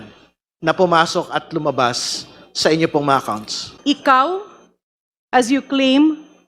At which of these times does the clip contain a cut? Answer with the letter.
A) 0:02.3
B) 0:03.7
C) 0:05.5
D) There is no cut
B